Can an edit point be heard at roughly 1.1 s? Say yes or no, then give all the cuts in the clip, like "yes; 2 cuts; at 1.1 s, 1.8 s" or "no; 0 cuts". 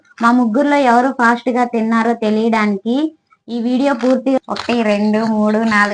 no; 1 cut; at 4.4 s